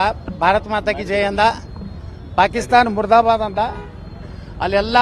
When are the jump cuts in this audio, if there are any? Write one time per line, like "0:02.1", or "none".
none